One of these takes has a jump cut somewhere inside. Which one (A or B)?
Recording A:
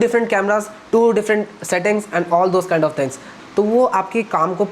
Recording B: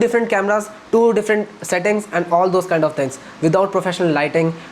A